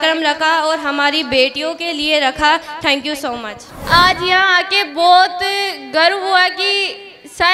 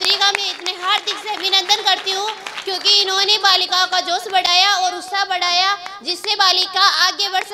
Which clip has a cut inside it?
first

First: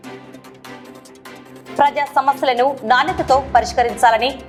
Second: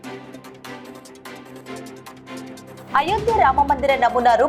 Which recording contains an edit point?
second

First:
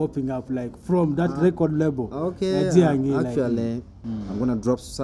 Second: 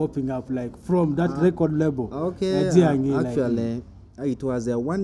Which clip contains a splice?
first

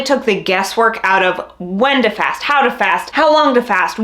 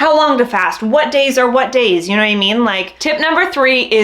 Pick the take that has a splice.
second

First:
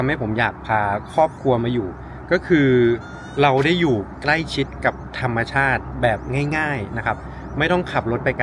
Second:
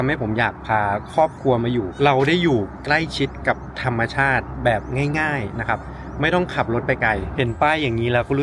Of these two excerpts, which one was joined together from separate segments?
second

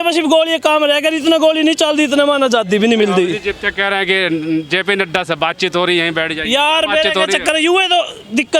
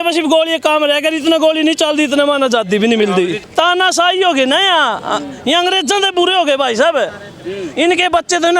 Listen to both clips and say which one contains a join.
second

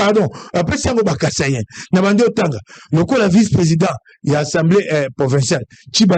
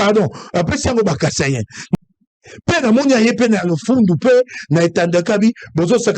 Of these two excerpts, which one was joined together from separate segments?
second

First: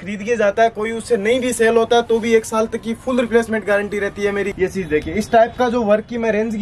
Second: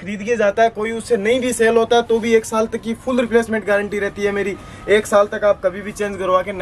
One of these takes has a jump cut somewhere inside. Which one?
first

